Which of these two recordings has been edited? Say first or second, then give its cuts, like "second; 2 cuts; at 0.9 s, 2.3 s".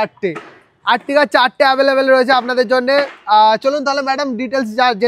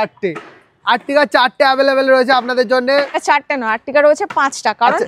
second; 1 cut; at 3.2 s